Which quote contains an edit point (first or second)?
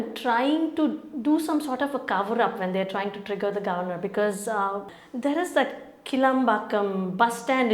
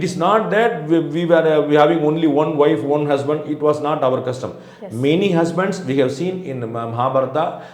first